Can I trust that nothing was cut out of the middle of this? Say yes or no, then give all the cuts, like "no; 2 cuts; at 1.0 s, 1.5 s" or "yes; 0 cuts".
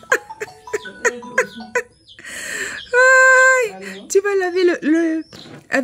yes; 0 cuts